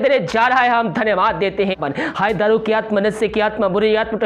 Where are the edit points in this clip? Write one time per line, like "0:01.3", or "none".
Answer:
0:01.8